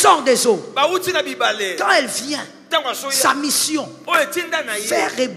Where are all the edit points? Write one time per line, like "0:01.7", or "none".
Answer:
none